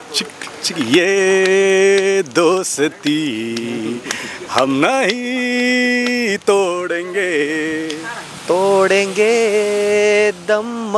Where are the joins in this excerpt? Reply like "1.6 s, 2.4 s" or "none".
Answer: none